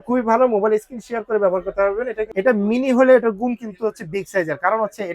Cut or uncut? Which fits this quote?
cut